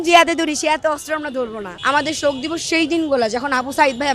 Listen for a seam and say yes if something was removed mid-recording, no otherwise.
yes